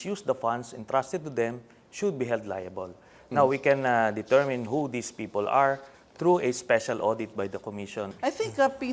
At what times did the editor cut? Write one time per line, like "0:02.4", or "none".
none